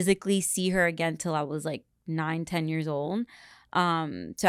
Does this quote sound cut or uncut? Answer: uncut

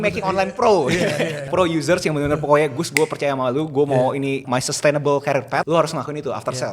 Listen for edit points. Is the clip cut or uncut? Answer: cut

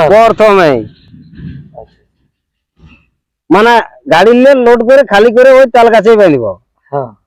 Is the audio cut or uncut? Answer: uncut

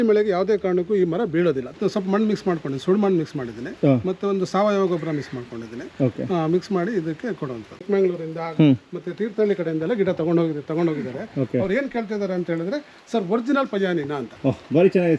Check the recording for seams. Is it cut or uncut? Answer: cut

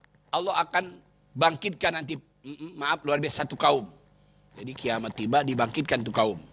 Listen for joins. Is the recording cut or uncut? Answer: uncut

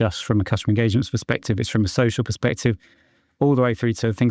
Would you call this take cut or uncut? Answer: uncut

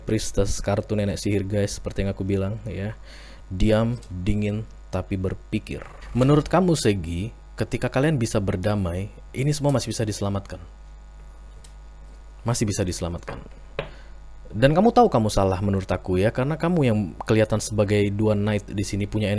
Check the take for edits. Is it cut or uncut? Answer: cut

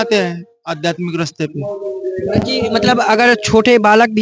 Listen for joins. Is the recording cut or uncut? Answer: uncut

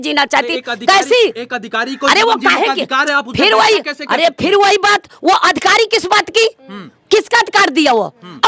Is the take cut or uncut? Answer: uncut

